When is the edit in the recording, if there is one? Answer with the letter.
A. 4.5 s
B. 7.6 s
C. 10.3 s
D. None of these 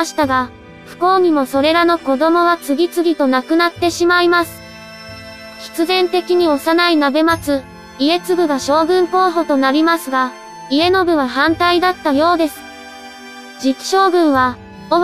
D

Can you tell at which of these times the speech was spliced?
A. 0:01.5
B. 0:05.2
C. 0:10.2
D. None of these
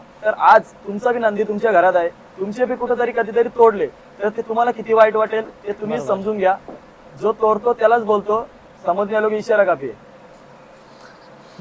D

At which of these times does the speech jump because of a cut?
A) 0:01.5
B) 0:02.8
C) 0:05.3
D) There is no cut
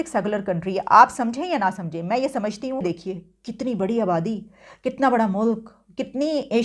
B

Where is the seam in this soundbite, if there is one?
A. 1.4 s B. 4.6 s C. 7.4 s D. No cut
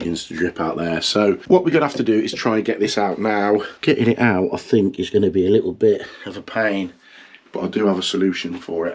A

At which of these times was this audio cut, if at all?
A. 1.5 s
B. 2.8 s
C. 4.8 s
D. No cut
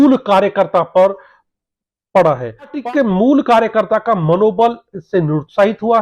B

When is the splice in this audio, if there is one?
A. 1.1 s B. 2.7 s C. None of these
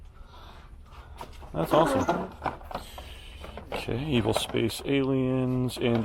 C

